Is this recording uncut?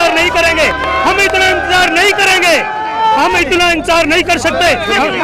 yes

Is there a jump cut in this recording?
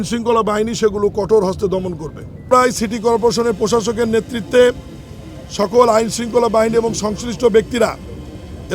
yes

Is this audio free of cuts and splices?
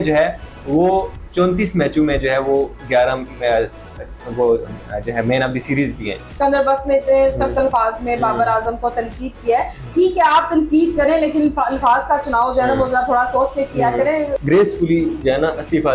no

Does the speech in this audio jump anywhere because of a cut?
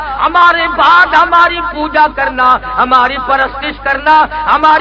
no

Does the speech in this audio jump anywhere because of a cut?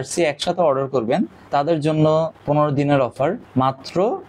no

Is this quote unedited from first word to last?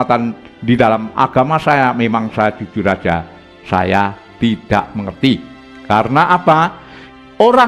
yes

